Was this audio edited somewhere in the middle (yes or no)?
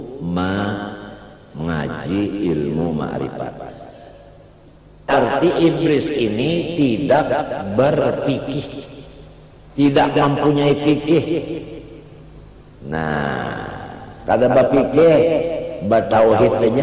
yes